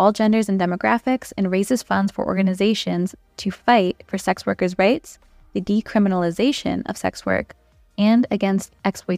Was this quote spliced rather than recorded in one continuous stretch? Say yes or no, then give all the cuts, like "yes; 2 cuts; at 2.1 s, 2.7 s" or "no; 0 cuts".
no; 0 cuts